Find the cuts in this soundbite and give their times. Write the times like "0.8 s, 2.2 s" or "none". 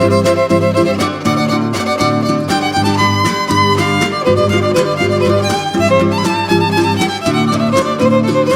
6.9 s